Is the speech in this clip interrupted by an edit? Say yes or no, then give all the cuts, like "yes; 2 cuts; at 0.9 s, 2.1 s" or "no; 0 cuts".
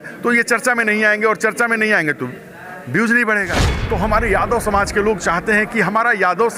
yes; 1 cut; at 3.7 s